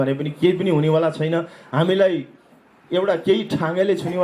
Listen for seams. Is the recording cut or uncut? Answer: uncut